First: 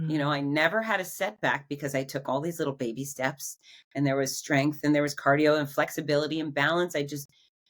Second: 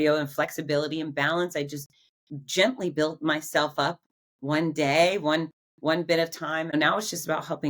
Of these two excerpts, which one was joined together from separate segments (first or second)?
second